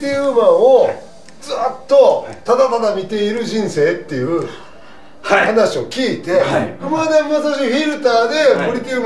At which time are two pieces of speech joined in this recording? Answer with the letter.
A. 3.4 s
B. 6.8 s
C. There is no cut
B